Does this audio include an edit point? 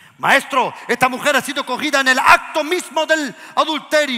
no; 0 cuts

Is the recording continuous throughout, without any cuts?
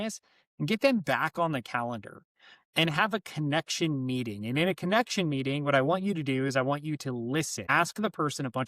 no; 1 cut; at 7.6 s

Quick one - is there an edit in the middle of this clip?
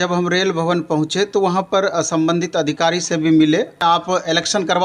yes; 1 cut; at 3.8 s

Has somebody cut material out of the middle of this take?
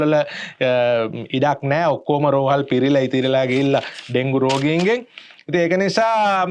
no; 0 cuts

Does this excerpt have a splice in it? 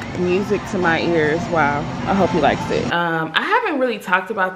yes; 1 cut; at 2.9 s

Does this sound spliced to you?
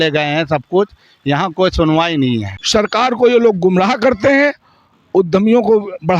yes; 1 cut; at 2.5 s

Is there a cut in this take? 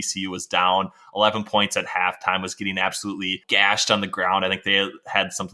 yes; 1 cut; at 3.4 s

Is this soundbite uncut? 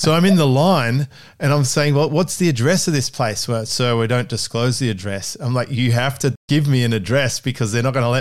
yes; 0 cuts

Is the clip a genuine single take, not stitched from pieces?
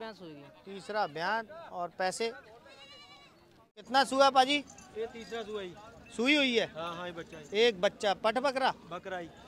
no; 1 cut; at 3.9 s

